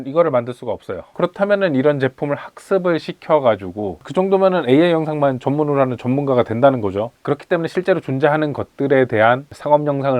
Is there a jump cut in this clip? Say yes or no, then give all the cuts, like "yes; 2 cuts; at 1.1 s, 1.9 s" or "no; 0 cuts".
yes; 3 cuts; at 1.0 s, 3.9 s, 7.1 s